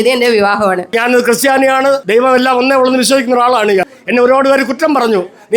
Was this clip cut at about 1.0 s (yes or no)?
yes